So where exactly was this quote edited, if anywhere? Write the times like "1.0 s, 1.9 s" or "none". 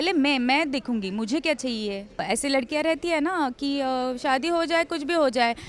2.2 s

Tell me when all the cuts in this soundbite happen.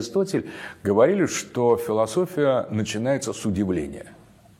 none

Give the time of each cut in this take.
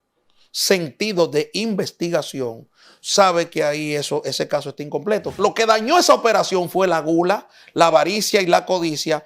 5.3 s

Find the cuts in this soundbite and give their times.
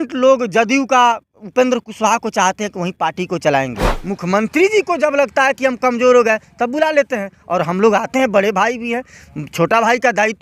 3.9 s

